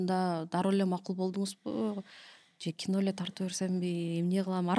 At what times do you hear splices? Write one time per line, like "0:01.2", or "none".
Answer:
none